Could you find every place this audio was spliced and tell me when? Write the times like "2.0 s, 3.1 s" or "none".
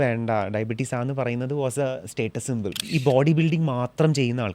2.8 s